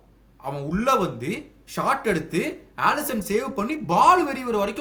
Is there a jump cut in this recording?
no; 0 cuts

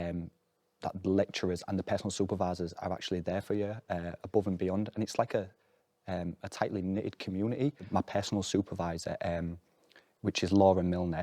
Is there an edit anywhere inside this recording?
yes; 1 cut; at 7.8 s

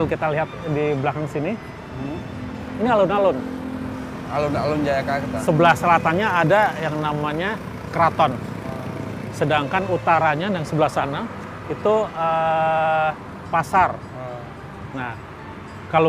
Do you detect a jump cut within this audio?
no; 0 cuts

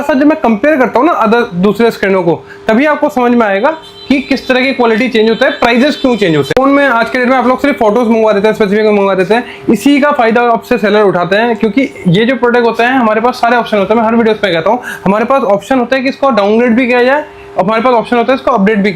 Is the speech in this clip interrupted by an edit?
no; 0 cuts

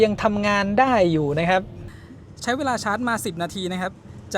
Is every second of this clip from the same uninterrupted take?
no; 1 cut; at 1.8 s

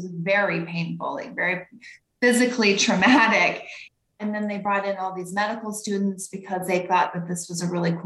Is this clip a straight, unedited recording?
no; 1 cut; at 3.9 s

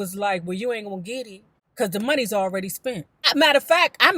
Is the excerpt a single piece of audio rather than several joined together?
no; 1 cut; at 3.2 s

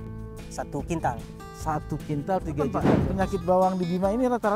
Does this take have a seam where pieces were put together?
yes; 1 cut; at 2.9 s

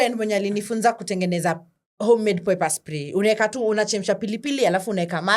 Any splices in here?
no; 0 cuts

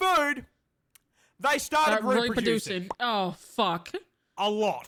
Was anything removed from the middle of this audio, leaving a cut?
no; 0 cuts

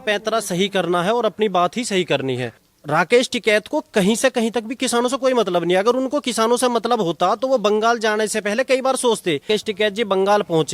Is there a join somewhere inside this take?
yes; 2 cuts; at 2.8 s, 9.5 s

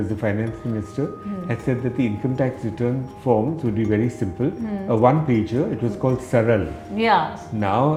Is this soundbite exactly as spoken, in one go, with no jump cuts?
yes; 0 cuts

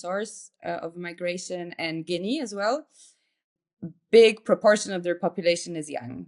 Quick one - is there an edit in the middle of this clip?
yes; 1 cut; at 3.4 s

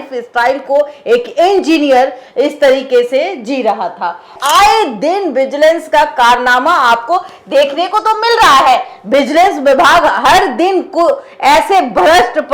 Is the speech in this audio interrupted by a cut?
yes; 1 cut; at 4.3 s

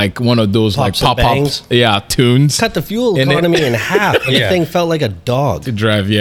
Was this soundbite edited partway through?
no; 0 cuts

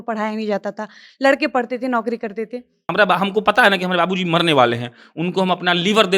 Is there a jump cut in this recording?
yes; 1 cut; at 2.8 s

